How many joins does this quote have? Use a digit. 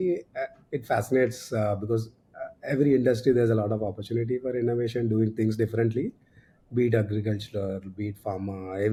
0